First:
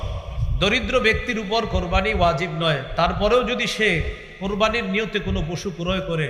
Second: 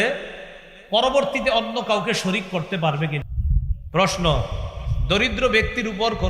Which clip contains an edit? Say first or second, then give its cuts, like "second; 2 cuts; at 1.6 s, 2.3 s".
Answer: second; 1 cut; at 3.2 s